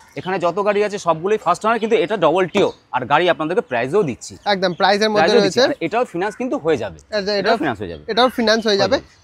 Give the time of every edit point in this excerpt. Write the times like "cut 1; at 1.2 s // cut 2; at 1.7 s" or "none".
none